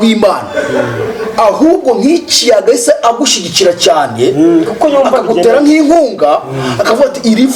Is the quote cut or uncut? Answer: uncut